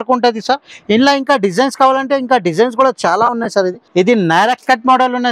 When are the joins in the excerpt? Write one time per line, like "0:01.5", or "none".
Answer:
0:03.8